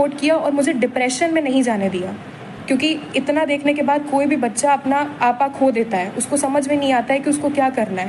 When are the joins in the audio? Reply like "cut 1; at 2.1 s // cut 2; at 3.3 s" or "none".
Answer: none